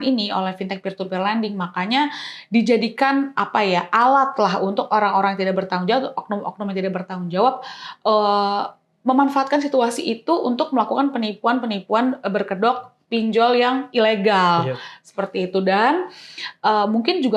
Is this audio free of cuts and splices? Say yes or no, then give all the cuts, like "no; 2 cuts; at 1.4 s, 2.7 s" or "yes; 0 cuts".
yes; 0 cuts